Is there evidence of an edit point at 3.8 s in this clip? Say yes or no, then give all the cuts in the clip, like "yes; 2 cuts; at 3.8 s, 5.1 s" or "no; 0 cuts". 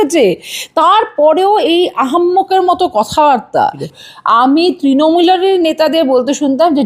yes; 1 cut; at 3.8 s